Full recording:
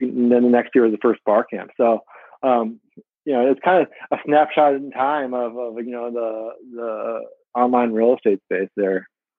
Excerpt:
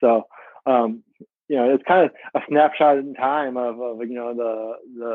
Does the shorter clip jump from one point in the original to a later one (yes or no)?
no